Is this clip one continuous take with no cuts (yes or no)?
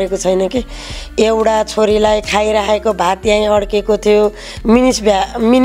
yes